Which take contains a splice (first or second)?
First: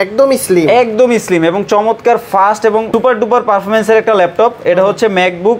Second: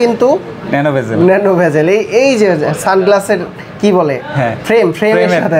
first